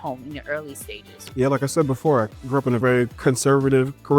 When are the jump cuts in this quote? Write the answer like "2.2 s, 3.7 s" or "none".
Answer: 1.3 s, 2.9 s